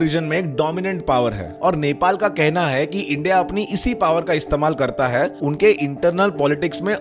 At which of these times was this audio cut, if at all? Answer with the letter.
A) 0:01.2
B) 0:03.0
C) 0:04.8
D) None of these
D